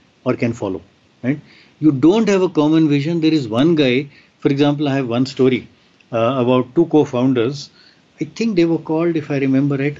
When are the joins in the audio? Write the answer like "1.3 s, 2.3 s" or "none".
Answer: none

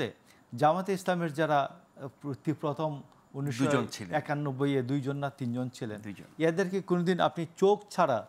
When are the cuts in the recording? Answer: none

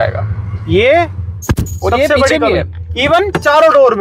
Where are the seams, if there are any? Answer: none

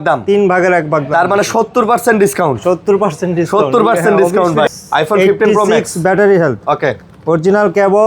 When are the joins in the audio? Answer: 4.7 s

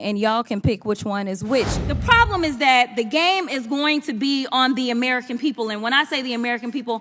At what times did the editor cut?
1.8 s

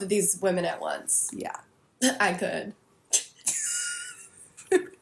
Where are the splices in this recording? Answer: none

